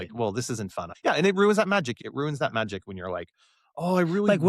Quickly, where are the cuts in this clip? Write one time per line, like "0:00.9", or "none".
0:00.9
0:01.9